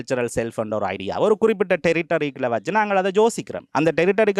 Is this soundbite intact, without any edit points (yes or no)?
yes